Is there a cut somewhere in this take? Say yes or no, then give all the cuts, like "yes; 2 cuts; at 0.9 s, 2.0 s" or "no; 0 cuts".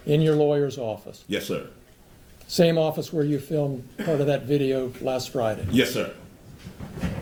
no; 0 cuts